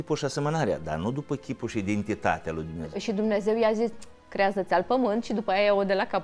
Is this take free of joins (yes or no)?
no